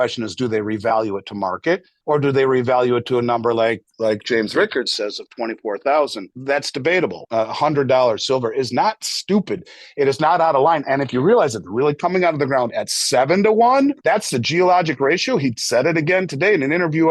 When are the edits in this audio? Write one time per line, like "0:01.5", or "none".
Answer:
0:01.9
0:06.3
0:07.2
0:14.0